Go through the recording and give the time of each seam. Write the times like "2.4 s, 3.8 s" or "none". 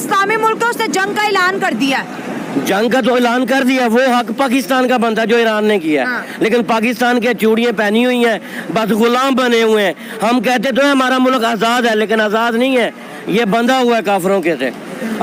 none